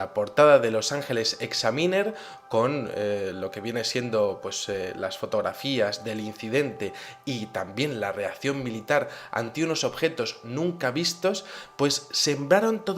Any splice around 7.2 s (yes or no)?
no